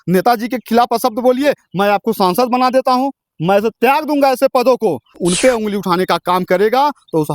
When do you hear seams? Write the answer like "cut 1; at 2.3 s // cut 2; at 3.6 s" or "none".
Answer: cut 1; at 5.2 s

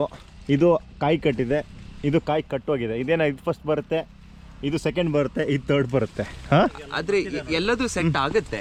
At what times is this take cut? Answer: none

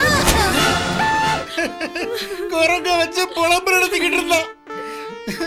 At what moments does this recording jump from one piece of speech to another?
cut 1; at 1.4 s

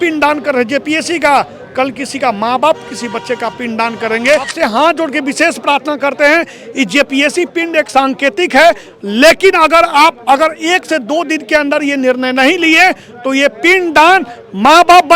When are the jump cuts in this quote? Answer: cut 1; at 4.5 s

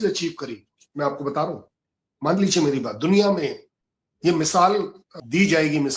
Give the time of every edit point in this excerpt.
cut 1; at 5.1 s

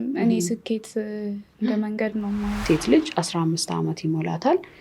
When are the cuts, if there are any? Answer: cut 1; at 2.6 s

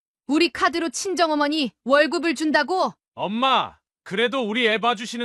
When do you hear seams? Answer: cut 1; at 3.0 s

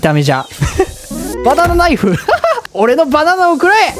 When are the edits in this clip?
cut 1; at 2.7 s

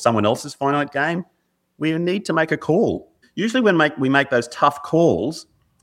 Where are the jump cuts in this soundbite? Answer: cut 1; at 3.2 s

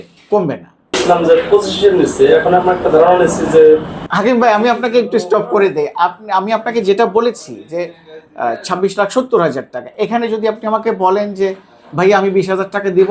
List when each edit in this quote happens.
cut 1; at 1.0 s

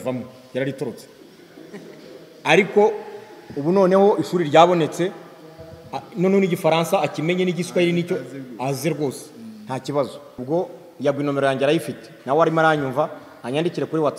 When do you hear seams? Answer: cut 1; at 10.4 s

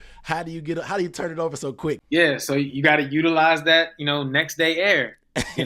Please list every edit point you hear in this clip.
cut 1; at 2.0 s

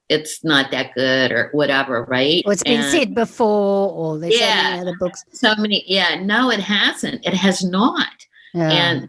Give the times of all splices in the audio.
cut 1; at 2.4 s

